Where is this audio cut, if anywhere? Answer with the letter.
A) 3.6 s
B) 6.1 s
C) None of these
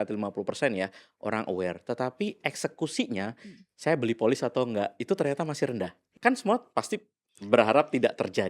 B